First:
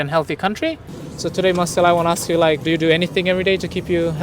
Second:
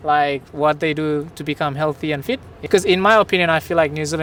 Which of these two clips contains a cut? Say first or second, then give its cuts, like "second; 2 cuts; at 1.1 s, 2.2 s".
first; 1 cut; at 0.9 s